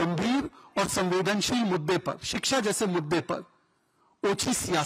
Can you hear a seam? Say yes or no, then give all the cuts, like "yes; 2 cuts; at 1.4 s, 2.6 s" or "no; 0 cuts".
no; 0 cuts